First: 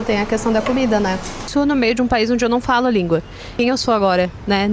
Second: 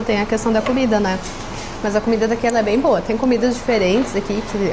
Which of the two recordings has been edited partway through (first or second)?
first